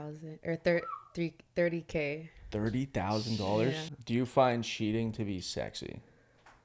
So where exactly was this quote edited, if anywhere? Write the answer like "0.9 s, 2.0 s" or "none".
3.9 s